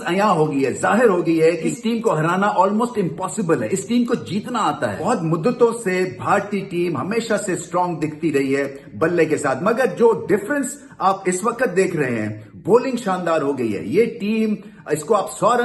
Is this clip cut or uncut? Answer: uncut